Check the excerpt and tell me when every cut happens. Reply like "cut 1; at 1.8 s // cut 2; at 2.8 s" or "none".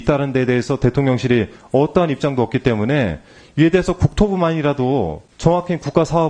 cut 1; at 5.2 s